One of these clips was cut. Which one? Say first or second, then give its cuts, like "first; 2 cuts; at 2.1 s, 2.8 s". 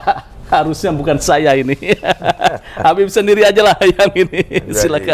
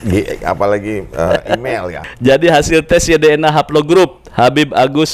second; 1 cut; at 1.9 s